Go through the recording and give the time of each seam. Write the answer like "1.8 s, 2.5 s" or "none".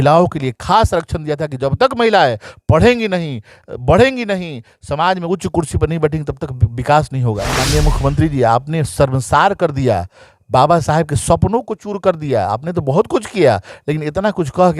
7.5 s